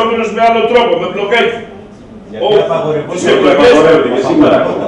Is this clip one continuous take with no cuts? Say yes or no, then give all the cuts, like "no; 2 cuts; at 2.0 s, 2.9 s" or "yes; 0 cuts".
yes; 0 cuts